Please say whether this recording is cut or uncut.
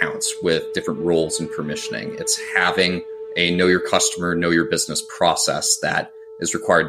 uncut